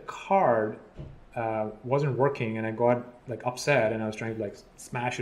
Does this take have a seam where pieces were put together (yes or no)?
no